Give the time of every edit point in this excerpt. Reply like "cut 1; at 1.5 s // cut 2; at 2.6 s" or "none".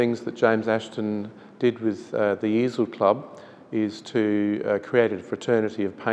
none